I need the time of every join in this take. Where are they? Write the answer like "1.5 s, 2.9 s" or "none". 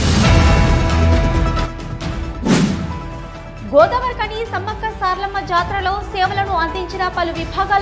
1.7 s